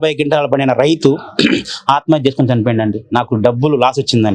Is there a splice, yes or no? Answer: no